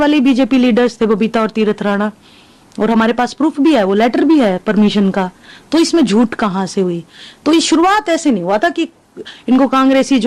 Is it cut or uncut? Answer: uncut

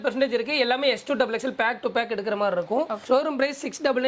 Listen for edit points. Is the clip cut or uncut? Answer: cut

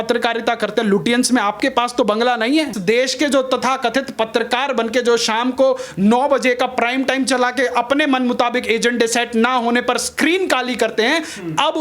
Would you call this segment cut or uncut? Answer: cut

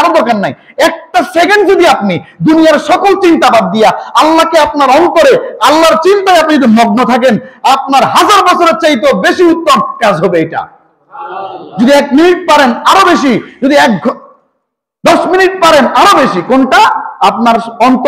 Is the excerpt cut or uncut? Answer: uncut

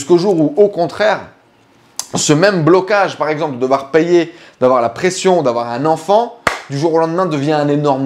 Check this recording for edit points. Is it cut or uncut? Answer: uncut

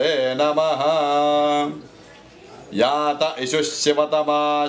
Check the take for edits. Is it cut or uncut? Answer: uncut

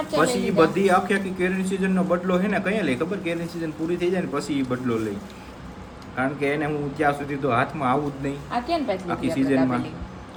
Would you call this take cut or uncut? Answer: uncut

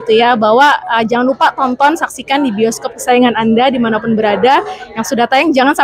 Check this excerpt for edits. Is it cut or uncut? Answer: uncut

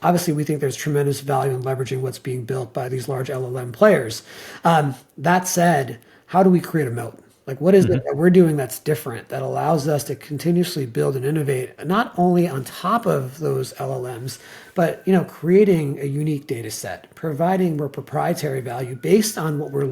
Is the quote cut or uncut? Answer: cut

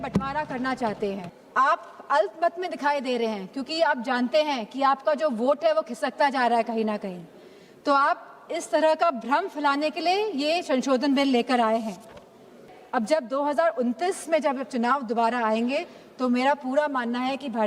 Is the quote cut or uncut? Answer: cut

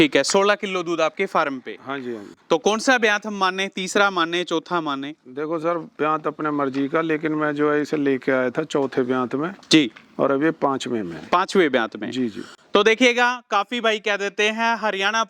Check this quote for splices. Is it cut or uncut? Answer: uncut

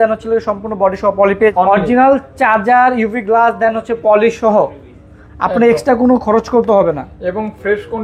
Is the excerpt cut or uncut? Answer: cut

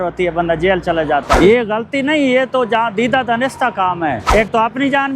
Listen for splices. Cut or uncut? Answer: cut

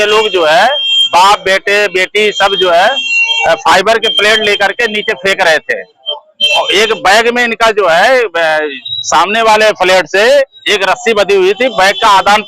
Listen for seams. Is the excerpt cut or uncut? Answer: uncut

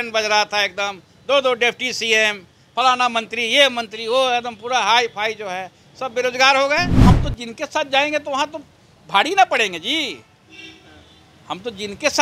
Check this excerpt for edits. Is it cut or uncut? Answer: cut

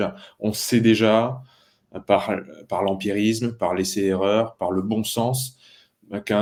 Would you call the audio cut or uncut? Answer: uncut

